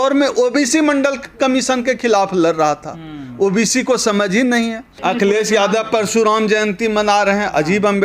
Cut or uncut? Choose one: cut